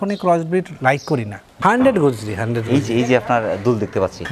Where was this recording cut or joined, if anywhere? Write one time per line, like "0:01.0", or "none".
0:01.5